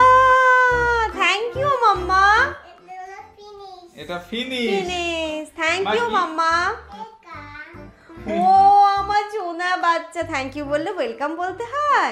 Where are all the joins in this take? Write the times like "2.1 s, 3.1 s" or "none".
none

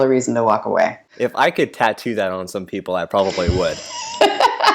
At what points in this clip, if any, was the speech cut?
1.0 s

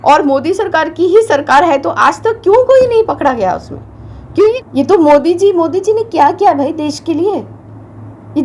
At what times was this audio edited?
4.6 s

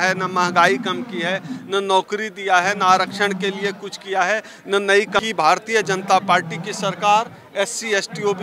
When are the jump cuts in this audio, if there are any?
5.2 s

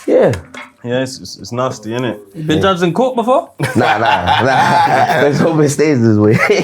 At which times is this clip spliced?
none

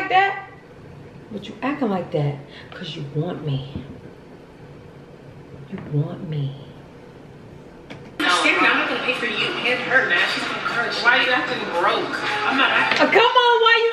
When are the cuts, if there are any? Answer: 8.2 s

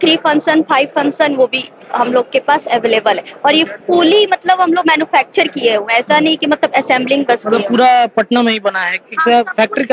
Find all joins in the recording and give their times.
none

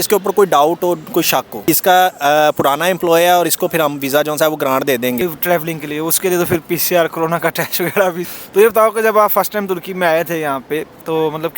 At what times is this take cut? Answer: 1.6 s, 5.2 s, 8.3 s

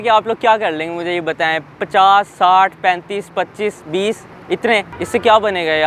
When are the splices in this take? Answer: none

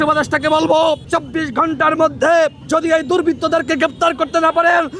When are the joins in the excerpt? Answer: 1.0 s, 2.6 s

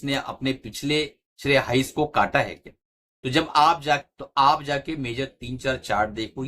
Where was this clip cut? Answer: 1.3 s, 4.1 s

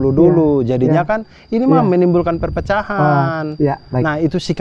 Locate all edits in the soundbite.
none

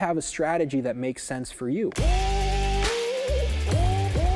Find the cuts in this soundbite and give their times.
2.0 s

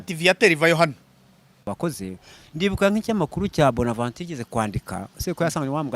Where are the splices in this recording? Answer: 1.7 s

